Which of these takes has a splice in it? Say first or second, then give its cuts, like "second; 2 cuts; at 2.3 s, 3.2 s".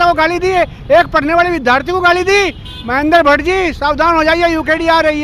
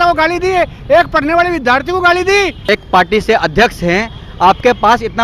second; 1 cut; at 2.7 s